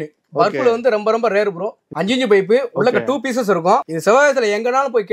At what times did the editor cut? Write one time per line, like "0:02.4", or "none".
0:01.8
0:03.9